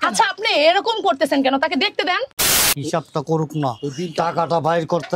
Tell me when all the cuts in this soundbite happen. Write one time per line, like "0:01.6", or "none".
0:02.7